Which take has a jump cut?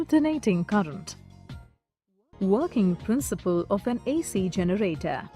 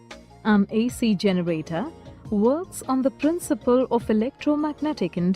second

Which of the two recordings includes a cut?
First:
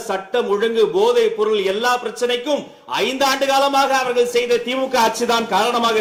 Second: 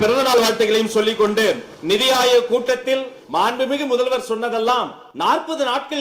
second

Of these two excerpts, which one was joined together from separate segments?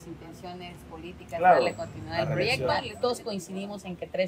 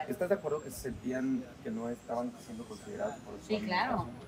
first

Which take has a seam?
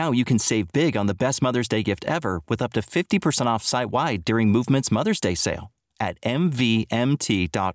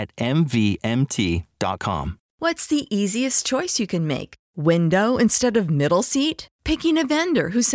second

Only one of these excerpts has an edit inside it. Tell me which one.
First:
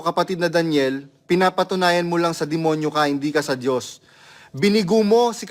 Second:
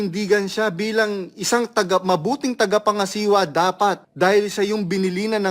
second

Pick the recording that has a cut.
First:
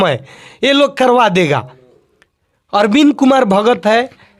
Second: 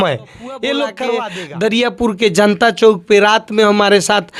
second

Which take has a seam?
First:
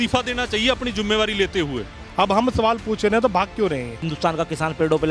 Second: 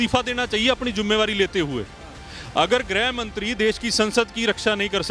first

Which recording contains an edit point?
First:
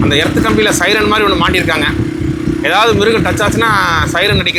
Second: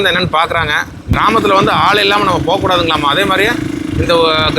second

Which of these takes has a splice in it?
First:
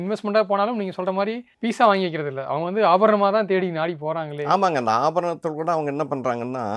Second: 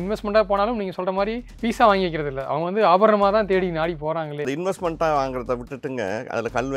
second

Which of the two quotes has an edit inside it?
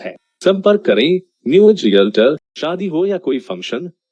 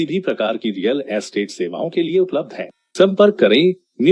first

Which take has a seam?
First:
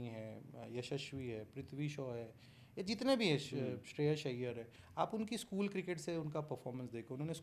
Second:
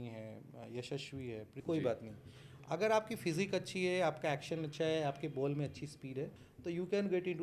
second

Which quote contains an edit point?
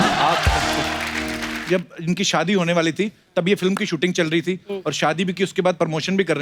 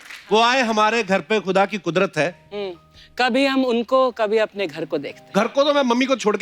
first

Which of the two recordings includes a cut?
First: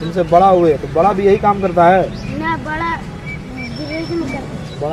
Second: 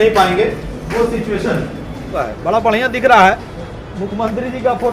second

